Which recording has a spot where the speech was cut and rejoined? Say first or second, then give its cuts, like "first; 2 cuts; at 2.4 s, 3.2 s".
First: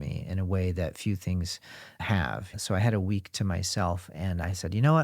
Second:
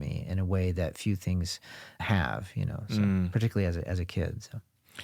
first; 1 cut; at 2.5 s